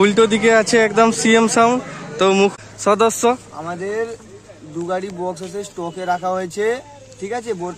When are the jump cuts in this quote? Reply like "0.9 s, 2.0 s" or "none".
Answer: 2.5 s